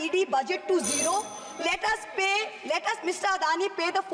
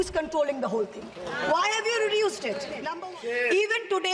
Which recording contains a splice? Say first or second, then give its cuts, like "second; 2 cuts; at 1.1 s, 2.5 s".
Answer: second; 1 cut; at 2.9 s